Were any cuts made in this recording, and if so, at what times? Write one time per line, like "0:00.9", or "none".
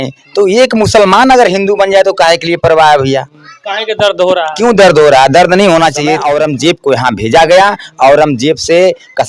0:06.2